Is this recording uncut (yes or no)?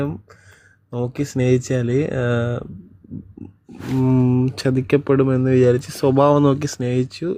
yes